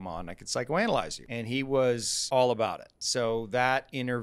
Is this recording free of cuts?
no; 3 cuts; at 1.2 s, 2.1 s, 2.9 s

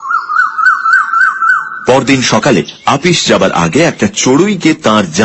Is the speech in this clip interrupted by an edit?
yes; 1 cut; at 3.2 s

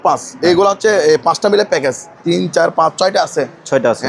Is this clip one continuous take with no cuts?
no; 1 cut; at 2.2 s

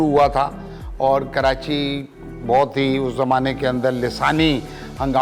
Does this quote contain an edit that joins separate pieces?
no; 0 cuts

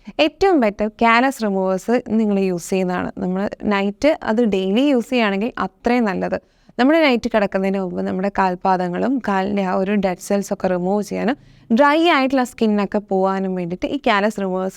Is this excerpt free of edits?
yes; 0 cuts

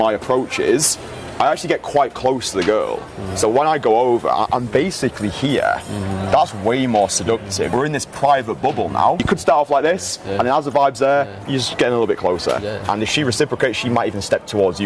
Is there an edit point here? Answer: yes; 2 cuts; at 7.6 s, 9.2 s

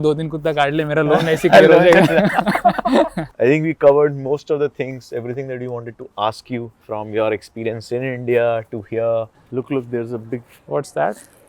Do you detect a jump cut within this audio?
yes; 3 cuts; at 3.3 s, 9.3 s, 10.5 s

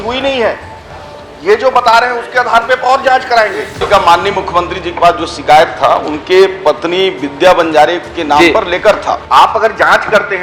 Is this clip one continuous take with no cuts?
no; 2 cuts; at 3.8 s, 9.2 s

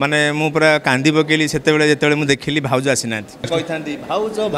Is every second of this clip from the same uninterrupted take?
no; 1 cut; at 3.5 s

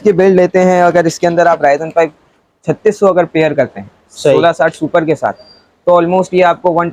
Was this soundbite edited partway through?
no; 0 cuts

